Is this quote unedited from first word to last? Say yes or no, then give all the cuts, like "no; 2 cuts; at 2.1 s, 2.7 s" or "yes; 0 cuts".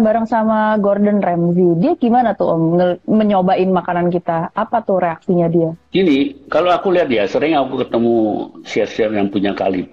yes; 0 cuts